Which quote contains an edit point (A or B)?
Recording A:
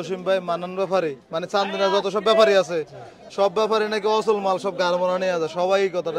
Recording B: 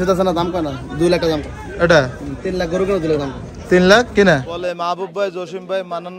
B